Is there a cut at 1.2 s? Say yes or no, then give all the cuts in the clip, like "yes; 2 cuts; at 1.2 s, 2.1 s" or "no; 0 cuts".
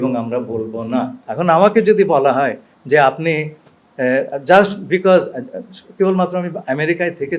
yes; 1 cut; at 1.2 s